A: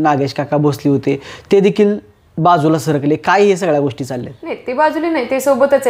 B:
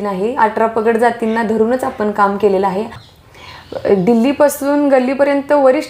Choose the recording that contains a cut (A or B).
B